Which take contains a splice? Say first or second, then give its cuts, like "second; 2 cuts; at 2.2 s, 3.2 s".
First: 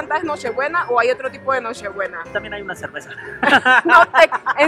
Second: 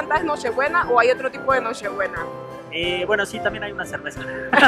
first; 1 cut; at 2.2 s